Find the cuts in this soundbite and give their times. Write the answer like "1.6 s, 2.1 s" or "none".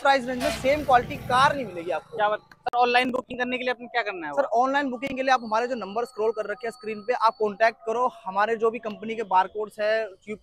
none